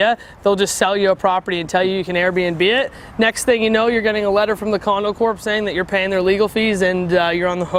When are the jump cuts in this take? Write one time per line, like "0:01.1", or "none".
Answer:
none